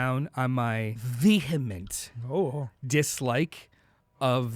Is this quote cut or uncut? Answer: cut